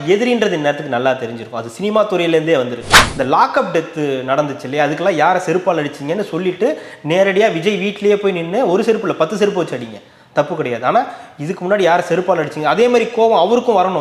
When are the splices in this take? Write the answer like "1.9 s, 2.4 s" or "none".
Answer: 2.9 s